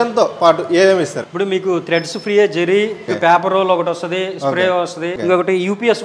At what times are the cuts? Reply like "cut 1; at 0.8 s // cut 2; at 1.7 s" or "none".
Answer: cut 1; at 1.2 s // cut 2; at 3.1 s // cut 3; at 5.2 s